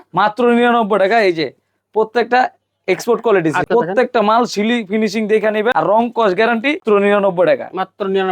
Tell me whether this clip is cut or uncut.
cut